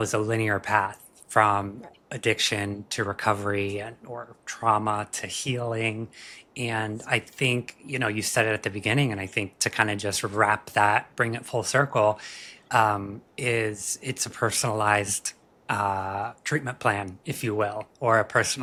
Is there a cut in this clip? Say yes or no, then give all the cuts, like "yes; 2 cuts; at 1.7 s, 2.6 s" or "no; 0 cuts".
no; 0 cuts